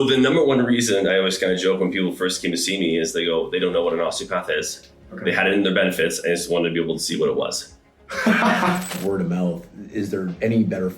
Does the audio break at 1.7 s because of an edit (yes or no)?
no